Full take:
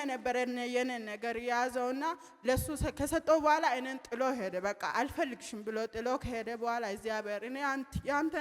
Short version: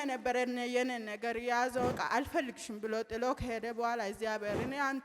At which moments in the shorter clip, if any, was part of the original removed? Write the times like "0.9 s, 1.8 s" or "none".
1.9 s